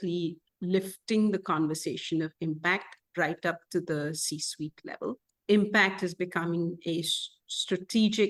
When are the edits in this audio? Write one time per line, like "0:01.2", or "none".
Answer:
none